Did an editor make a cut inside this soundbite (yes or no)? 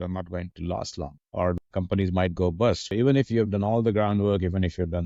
yes